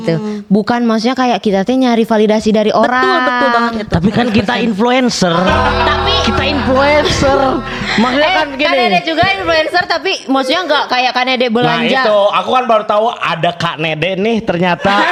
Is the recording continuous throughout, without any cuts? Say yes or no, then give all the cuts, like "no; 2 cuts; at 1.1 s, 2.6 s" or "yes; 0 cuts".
yes; 0 cuts